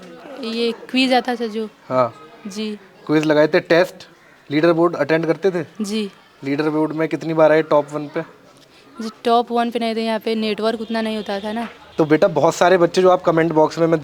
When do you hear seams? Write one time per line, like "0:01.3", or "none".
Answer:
0:11.8